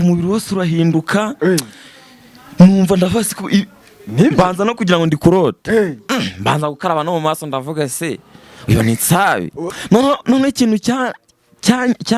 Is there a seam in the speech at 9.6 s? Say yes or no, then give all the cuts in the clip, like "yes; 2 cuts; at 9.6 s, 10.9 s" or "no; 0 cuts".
yes; 1 cut; at 9.6 s